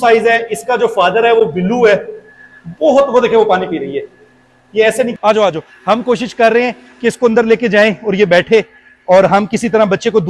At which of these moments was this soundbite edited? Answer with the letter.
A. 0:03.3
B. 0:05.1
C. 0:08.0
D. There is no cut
B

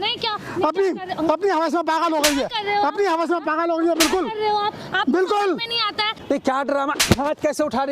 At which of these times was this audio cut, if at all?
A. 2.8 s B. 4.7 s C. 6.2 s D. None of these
C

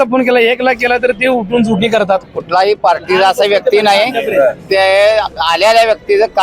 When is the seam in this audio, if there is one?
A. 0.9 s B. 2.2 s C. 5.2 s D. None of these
B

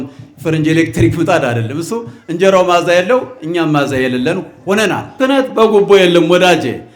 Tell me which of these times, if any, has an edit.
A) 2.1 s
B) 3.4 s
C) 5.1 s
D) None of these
C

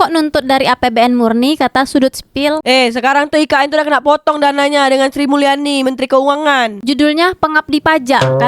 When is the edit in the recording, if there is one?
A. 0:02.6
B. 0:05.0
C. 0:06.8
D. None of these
C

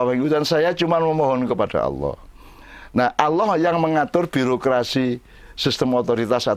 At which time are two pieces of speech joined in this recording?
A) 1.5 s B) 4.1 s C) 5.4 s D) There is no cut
D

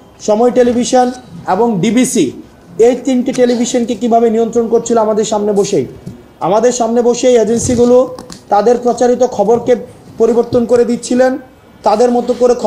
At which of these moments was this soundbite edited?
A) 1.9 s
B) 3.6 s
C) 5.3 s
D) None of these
D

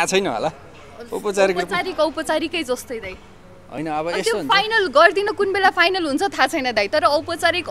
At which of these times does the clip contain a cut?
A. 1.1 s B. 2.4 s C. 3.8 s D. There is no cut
D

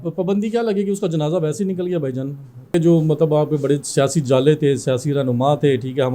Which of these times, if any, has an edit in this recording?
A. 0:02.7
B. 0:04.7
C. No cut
A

